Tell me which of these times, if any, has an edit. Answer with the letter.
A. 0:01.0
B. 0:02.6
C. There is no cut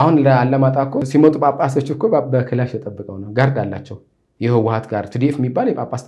A